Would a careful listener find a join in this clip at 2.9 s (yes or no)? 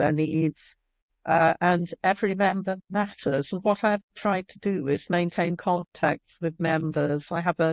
no